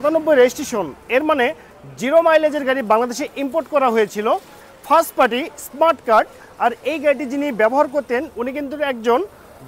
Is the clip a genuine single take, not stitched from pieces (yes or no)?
yes